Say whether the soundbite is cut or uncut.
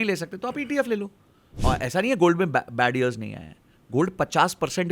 cut